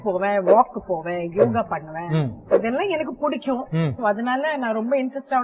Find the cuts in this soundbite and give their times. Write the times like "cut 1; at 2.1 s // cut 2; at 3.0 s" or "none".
none